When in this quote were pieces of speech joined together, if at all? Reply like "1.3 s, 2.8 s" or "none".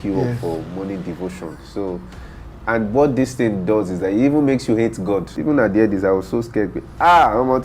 5.3 s